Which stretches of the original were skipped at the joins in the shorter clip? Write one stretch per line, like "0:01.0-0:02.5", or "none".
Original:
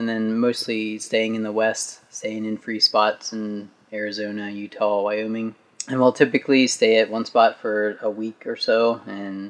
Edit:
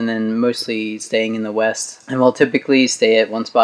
0:01.9-0:05.7